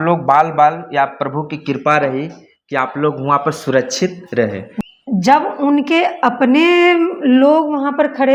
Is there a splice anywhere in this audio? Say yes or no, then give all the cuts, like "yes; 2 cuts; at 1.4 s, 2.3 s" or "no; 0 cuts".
yes; 1 cut; at 4.7 s